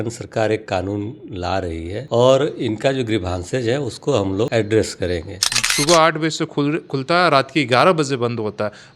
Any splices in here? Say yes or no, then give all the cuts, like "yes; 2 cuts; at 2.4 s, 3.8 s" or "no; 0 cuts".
yes; 2 cuts; at 2.1 s, 5.7 s